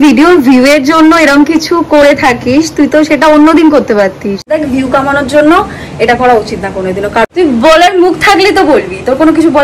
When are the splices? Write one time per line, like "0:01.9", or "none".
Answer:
0:04.5
0:07.2